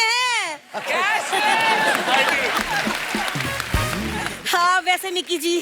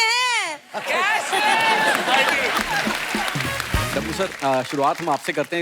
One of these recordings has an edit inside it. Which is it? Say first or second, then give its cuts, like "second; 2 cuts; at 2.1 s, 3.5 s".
second; 1 cut; at 3.9 s